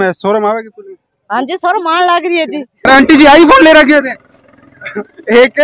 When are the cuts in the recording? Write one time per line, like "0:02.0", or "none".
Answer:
0:02.9